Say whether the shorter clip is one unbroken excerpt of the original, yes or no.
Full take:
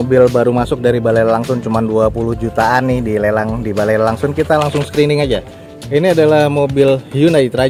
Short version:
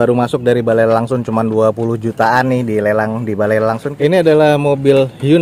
no